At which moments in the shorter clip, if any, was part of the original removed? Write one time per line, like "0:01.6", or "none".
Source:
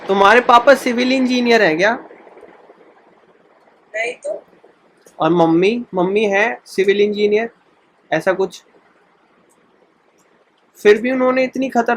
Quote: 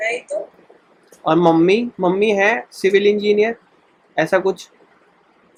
none